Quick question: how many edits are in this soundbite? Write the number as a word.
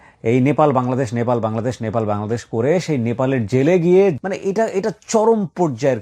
one